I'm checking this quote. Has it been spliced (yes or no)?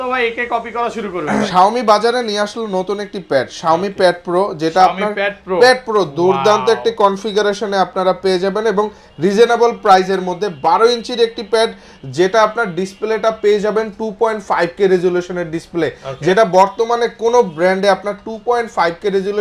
yes